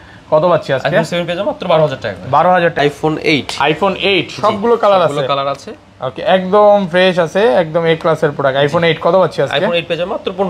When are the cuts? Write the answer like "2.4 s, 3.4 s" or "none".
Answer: 2.8 s